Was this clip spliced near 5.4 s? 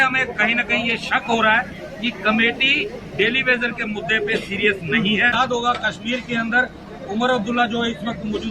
yes; 1 cut; at 5.4 s

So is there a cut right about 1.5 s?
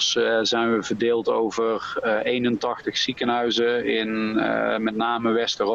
no; 0 cuts

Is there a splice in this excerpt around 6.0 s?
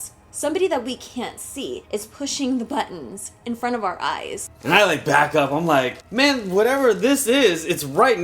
yes; 3 cuts; at 1.8 s, 4.5 s, 6.0 s

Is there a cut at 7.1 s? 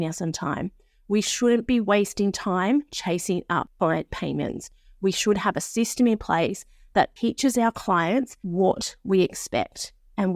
no; 2 cuts; at 3.7 s, 8.4 s

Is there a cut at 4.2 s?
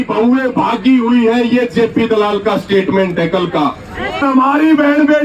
yes; 1 cut; at 4.2 s

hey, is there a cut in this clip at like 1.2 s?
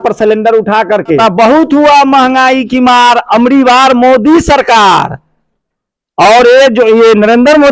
yes; 1 cut; at 1.2 s

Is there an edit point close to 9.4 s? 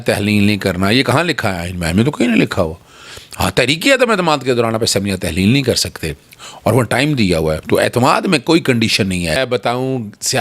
yes; 1 cut; at 9.4 s

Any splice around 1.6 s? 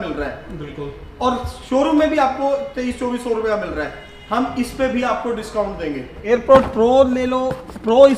no; 1 cut; at 6.3 s

